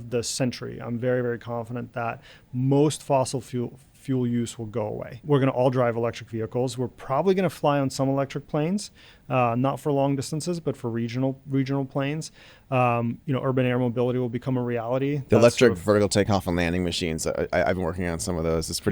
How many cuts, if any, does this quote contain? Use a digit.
1